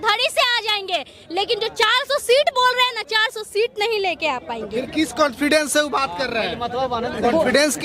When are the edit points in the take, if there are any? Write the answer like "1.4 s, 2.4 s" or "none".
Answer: none